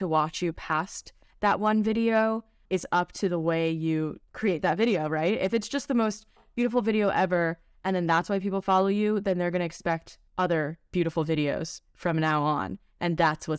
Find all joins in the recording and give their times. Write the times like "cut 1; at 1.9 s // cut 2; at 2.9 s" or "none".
cut 1; at 2.6 s // cut 2; at 4.2 s // cut 3; at 10.2 s